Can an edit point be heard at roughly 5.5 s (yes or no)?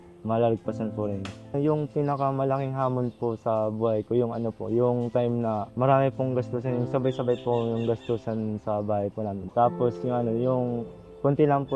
no